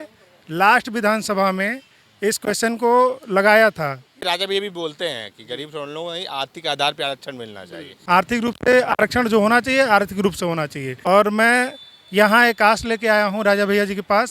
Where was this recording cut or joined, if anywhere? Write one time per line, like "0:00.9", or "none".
0:04.1
0:07.9
0:10.9